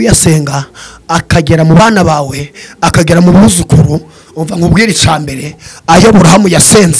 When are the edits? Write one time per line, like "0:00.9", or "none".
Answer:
none